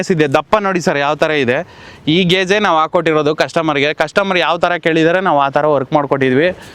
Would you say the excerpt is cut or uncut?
uncut